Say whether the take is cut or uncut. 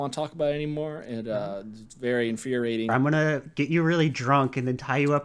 cut